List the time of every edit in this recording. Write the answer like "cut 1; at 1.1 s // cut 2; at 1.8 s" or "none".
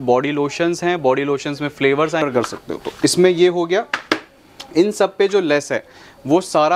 cut 1; at 2.2 s